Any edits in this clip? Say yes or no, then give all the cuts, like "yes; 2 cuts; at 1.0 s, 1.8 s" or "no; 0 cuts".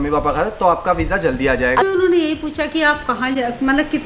yes; 1 cut; at 1.8 s